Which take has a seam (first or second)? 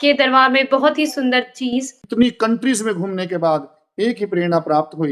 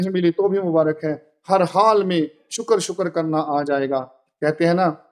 first